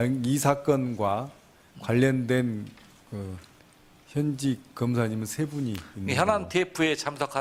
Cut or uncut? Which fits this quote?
uncut